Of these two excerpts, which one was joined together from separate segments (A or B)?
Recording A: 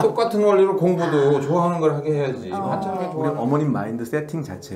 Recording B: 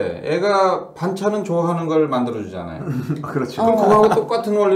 A